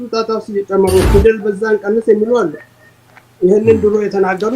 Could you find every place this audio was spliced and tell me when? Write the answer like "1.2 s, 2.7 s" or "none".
1.1 s